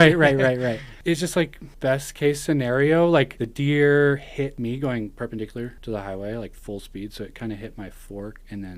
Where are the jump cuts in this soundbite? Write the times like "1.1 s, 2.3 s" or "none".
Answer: 0.9 s, 1.6 s, 3.4 s, 4.6 s, 5.8 s